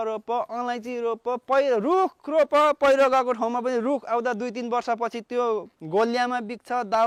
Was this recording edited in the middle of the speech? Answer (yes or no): no